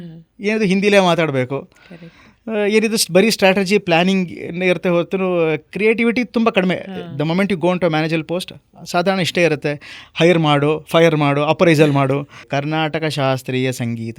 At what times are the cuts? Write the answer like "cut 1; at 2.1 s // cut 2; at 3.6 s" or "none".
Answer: cut 1; at 12.4 s